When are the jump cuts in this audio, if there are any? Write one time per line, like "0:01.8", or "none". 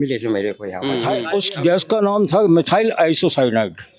0:01.2